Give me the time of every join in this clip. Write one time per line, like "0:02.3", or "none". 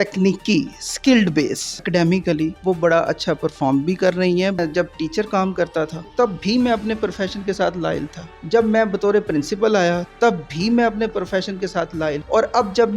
0:04.6